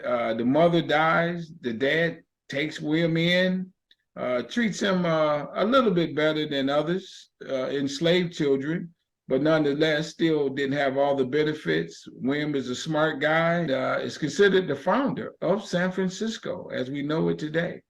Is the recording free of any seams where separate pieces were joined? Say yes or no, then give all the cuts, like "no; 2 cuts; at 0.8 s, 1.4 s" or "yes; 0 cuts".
no; 1 cut; at 13.7 s